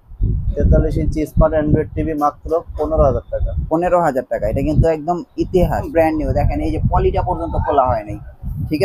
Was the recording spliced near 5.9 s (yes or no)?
yes